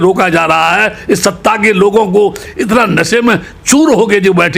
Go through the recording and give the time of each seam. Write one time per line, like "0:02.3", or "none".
none